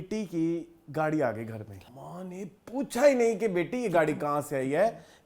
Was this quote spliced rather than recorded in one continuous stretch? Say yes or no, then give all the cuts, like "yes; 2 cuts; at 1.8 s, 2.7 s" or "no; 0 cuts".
yes; 1 cut; at 1.8 s